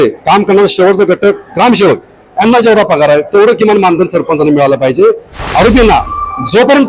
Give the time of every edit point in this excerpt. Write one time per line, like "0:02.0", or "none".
0:05.3